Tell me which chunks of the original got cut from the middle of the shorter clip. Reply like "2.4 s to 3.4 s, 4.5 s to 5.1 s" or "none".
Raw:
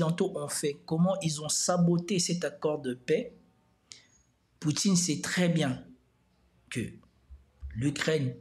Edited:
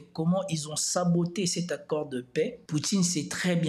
3.3 s to 4.5 s